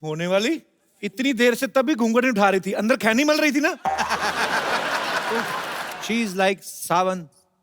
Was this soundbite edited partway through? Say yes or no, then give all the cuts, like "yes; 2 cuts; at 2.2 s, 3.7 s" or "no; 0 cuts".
yes; 1 cut; at 5.8 s